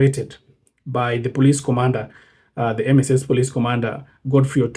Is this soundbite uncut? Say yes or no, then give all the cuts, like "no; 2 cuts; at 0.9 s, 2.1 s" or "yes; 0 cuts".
yes; 0 cuts